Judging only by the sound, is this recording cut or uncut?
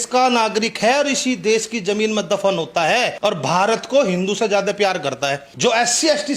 cut